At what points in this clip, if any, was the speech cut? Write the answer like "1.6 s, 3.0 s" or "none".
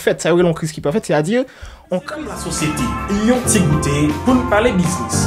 2.1 s